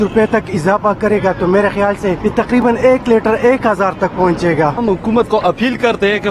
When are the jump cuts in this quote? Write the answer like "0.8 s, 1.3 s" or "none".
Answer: 2.6 s, 4.8 s